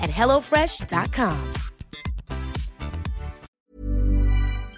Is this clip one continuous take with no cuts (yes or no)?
no